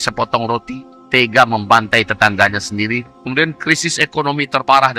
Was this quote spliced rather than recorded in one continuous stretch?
yes; 1 cut; at 3.1 s

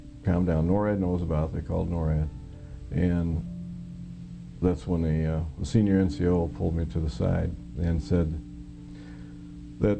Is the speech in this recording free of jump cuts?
yes; 0 cuts

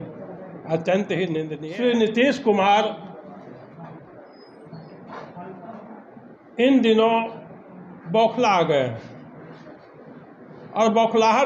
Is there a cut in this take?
yes; 1 cut; at 1.5 s

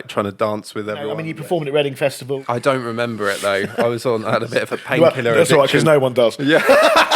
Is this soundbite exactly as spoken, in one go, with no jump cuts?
no; 2 cuts; at 1.2 s, 2.4 s

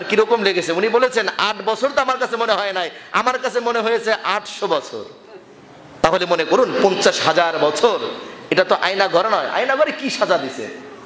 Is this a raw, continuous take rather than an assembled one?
no; 1 cut; at 6.0 s

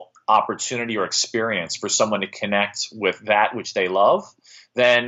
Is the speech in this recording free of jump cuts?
yes; 0 cuts

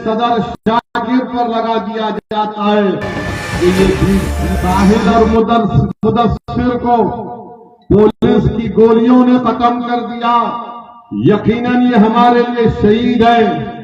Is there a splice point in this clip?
yes; 1 cut; at 4.4 s

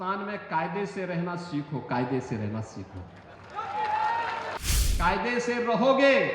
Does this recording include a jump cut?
yes; 1 cut; at 4.6 s

